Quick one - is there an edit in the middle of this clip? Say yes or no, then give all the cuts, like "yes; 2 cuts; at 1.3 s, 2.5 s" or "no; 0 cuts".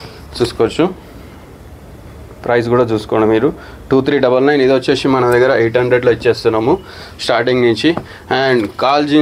no; 0 cuts